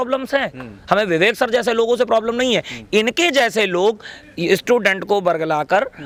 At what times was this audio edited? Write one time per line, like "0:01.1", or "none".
none